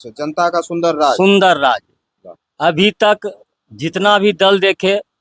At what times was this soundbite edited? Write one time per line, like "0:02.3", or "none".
none